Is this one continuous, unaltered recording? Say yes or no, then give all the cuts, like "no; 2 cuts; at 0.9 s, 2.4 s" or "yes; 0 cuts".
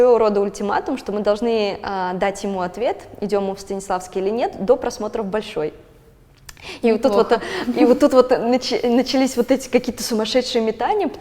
yes; 0 cuts